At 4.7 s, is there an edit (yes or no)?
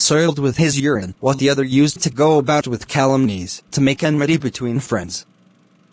no